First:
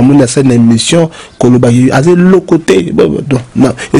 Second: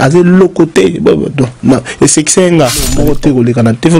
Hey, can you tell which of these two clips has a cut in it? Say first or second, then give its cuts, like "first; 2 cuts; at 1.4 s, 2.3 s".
second; 1 cut; at 3.0 s